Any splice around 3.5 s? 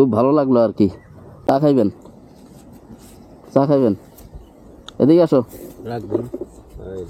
no; 1 cut; at 1.5 s

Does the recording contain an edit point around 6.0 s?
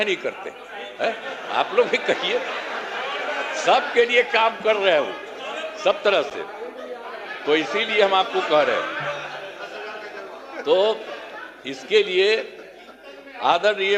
no; 0 cuts

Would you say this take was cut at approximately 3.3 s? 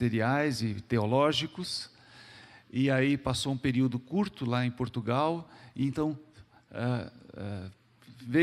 no; 1 cut; at 6.0 s

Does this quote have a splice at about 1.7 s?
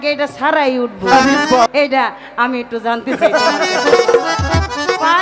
yes; 1 cut; at 1.7 s

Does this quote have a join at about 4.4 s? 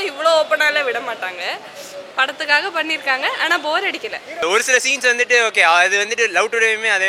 yes; 1 cut; at 4.4 s

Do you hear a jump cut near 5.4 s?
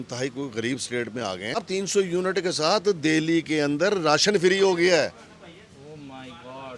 no; 1 cut; at 1.5 s

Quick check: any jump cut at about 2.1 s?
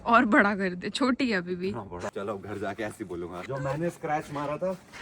yes; 2 cuts; at 2.1 s, 3.5 s

